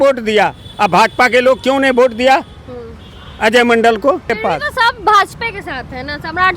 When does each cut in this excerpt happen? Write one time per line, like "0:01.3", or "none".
0:04.3

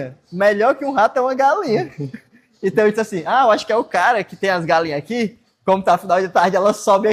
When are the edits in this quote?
none

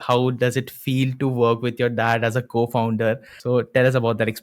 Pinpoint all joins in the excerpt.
0:03.3

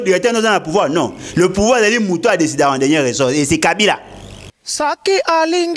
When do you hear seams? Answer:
0:04.5

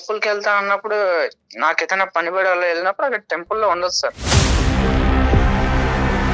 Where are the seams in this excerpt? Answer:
0:04.2

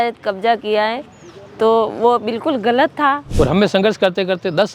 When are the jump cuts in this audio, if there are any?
0:03.2

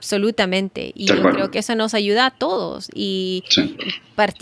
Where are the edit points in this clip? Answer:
none

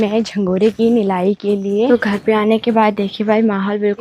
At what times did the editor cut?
0:01.9

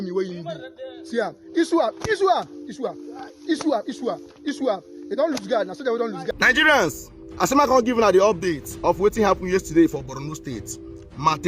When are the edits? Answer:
0:05.9

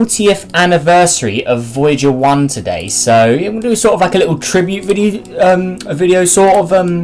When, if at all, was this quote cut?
0:01.0

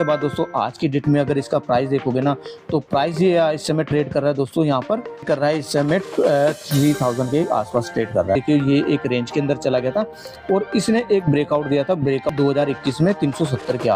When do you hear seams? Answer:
0:08.4
0:12.3

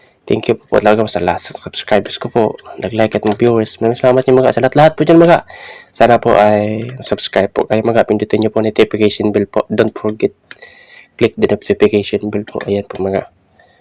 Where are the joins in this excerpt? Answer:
none

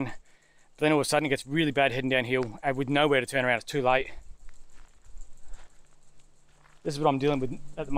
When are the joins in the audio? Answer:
none

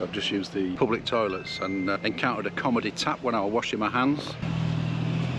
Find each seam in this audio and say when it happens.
0:00.8
0:02.0
0:04.4

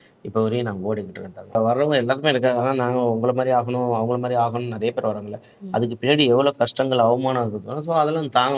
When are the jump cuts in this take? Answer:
0:01.6

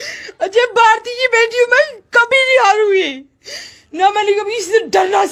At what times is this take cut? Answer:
none

